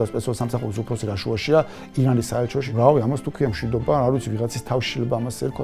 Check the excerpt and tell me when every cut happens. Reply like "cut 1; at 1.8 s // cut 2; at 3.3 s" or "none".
cut 1; at 2.6 s